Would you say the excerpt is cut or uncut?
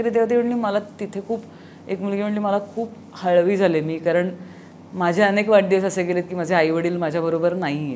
uncut